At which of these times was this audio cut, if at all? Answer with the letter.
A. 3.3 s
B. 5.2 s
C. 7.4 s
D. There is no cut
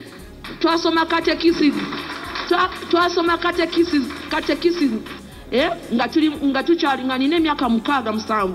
B